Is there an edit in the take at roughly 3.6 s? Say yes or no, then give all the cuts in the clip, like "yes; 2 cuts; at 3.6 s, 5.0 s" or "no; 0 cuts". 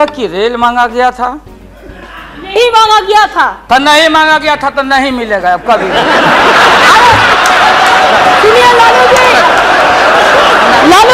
no; 0 cuts